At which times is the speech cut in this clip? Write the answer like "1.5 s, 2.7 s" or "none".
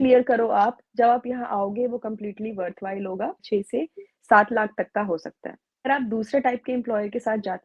3.4 s, 5.9 s